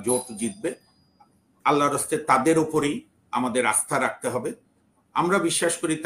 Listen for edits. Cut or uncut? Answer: uncut